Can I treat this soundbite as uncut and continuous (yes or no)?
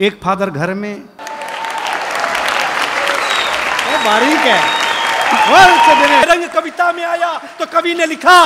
no